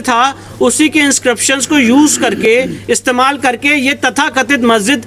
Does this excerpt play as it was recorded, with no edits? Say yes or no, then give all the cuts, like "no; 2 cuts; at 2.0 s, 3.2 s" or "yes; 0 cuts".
yes; 0 cuts